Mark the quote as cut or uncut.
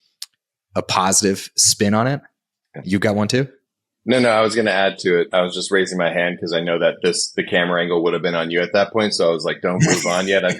uncut